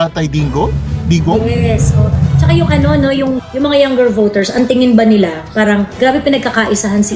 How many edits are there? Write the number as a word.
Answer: two